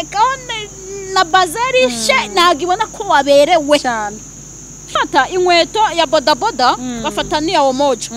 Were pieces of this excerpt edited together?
no; 0 cuts

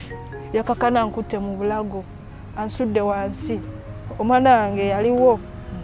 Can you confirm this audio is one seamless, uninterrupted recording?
yes; 0 cuts

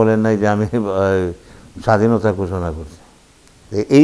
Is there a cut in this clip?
no; 0 cuts

